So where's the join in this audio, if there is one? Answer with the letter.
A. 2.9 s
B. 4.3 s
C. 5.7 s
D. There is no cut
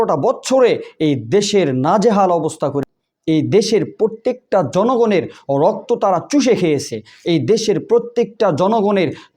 A